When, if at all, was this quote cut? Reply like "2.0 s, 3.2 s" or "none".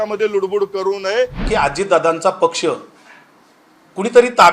1.5 s